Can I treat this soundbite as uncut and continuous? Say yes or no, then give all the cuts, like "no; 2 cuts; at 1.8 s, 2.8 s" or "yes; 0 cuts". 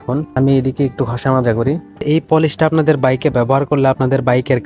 no; 1 cut; at 2.0 s